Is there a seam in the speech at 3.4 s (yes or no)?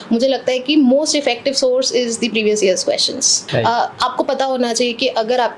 yes